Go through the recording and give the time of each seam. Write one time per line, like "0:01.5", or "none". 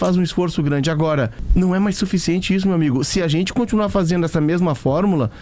0:01.4